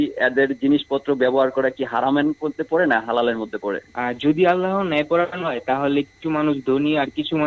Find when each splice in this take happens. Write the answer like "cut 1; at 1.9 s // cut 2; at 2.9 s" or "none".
cut 1; at 3.9 s